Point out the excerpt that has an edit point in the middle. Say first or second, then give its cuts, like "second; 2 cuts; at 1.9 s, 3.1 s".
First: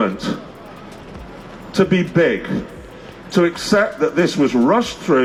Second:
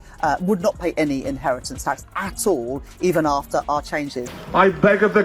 second; 1 cut; at 4.2 s